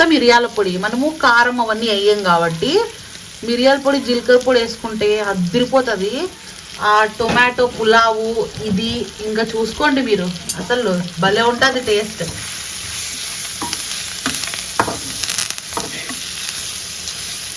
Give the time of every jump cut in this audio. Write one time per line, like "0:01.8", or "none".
none